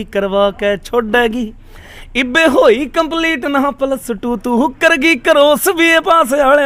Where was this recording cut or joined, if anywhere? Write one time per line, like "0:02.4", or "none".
none